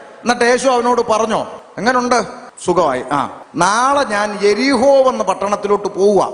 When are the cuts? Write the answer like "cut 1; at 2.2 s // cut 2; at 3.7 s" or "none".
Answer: cut 1; at 1.6 s // cut 2; at 2.4 s // cut 3; at 3.4 s